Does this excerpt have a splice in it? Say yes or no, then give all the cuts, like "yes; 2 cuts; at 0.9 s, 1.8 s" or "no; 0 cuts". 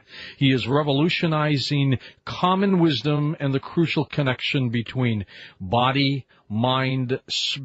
no; 0 cuts